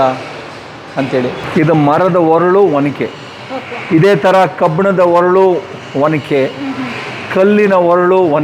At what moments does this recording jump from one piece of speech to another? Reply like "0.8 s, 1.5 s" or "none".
1.4 s